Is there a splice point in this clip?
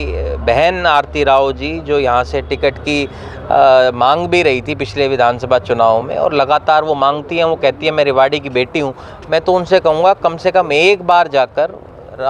no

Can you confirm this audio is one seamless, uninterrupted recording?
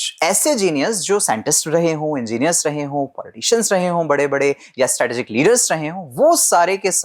yes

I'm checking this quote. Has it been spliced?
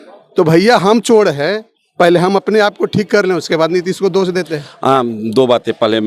yes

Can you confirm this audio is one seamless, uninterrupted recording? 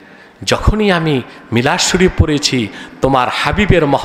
yes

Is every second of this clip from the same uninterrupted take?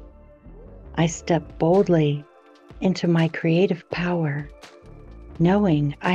no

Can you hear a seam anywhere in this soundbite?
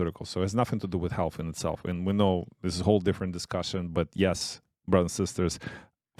no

